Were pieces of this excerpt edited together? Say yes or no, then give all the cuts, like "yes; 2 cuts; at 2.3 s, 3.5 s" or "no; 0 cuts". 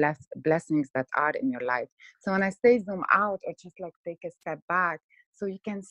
no; 0 cuts